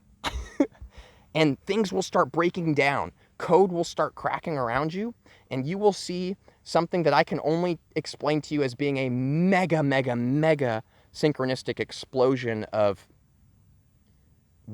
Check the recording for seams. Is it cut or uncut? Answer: uncut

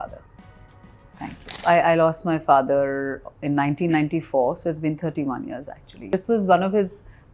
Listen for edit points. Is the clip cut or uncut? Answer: cut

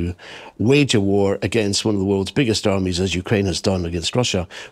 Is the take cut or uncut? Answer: uncut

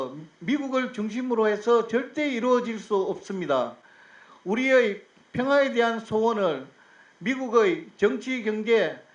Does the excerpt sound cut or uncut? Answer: uncut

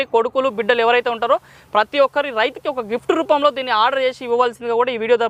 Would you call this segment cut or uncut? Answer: uncut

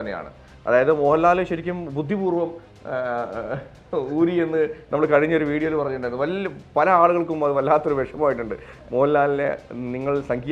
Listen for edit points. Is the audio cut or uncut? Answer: uncut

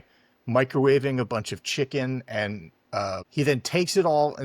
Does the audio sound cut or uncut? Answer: cut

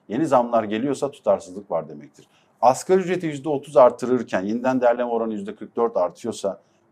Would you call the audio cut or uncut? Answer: uncut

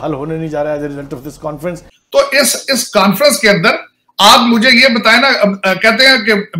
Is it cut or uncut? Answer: cut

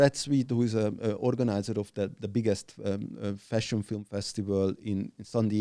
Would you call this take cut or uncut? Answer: uncut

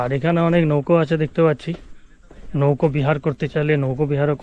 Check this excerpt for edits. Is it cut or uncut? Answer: uncut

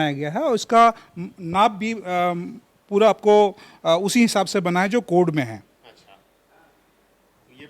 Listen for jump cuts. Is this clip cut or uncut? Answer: uncut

